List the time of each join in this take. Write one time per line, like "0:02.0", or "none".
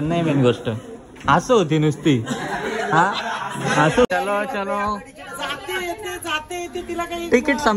0:04.1